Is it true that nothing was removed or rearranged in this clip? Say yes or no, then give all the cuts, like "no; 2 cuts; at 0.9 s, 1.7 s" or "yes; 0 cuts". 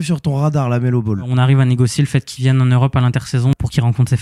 no; 2 cuts; at 1.3 s, 3.5 s